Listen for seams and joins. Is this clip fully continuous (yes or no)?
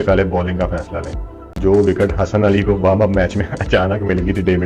no